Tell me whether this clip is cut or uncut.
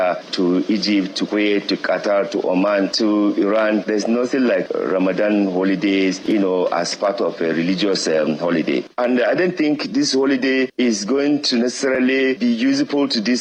uncut